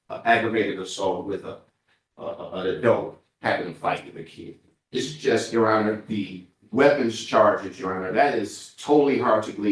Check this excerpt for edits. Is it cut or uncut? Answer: uncut